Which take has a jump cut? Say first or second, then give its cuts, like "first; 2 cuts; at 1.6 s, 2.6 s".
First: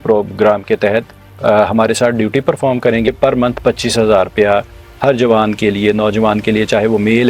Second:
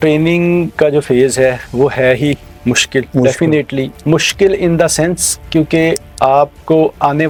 first; 1 cut; at 3.1 s